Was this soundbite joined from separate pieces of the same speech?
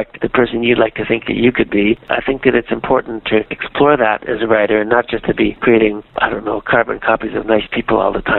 no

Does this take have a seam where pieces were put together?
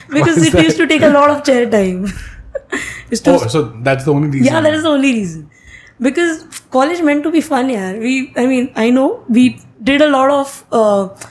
no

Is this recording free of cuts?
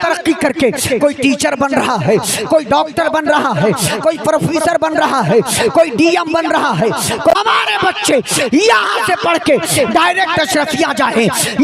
no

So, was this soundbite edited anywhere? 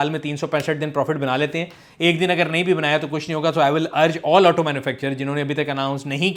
no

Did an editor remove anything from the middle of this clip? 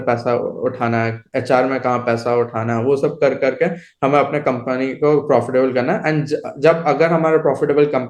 no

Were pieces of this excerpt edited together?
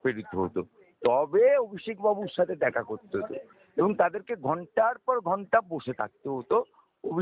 no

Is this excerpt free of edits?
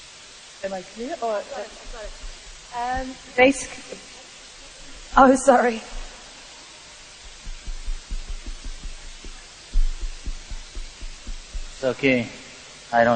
no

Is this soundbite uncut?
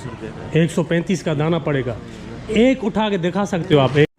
yes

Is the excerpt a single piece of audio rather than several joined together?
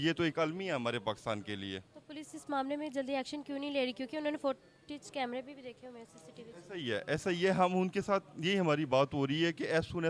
yes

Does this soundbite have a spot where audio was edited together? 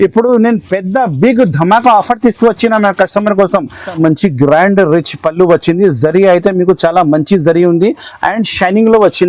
yes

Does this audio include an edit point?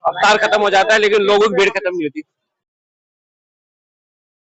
no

